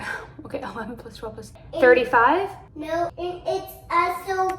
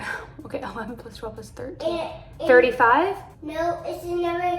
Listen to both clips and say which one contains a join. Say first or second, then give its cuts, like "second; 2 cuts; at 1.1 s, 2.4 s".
first; 2 cuts; at 1.5 s, 3.2 s